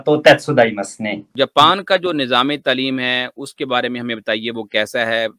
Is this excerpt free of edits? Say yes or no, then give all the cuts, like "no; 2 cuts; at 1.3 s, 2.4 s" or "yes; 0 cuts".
no; 1 cut; at 1.3 s